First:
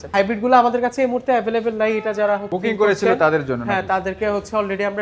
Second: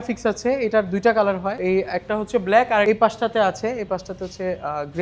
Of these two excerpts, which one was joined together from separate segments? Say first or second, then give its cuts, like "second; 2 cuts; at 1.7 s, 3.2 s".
second; 2 cuts; at 1.5 s, 2.8 s